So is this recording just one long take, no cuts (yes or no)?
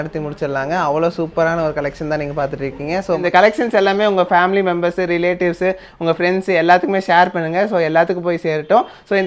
yes